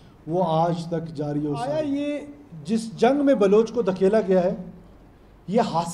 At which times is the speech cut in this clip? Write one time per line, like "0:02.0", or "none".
0:01.7